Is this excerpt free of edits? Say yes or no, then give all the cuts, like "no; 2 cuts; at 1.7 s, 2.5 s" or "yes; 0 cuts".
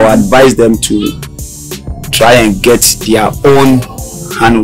yes; 0 cuts